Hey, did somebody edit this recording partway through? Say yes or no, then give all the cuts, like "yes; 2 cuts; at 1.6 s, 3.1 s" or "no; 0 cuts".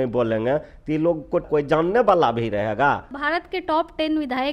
yes; 2 cuts; at 1.4 s, 3.1 s